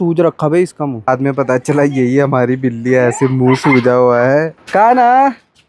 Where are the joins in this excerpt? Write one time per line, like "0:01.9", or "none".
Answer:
0:01.1
0:04.6